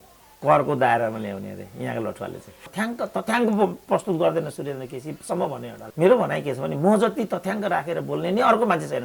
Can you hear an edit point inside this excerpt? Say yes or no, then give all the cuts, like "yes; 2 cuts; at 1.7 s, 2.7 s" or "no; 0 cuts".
yes; 1 cut; at 2.7 s